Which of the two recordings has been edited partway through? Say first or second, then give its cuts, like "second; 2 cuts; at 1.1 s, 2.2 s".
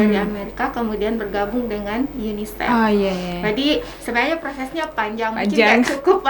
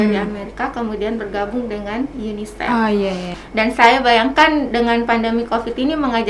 second; 1 cut; at 3.4 s